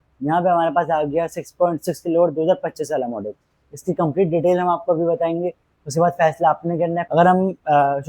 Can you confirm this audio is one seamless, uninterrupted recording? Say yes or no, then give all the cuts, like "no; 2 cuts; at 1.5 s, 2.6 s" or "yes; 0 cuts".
no; 1 cut; at 7.0 s